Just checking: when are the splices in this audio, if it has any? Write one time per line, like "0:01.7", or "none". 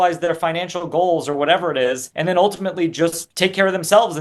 0:02.1
0:03.2